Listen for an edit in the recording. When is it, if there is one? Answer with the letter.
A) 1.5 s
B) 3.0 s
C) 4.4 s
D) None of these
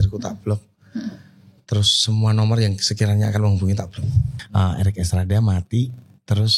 C